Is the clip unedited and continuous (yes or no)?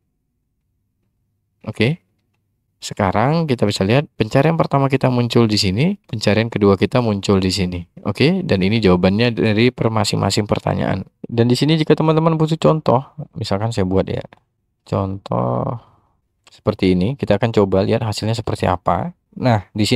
no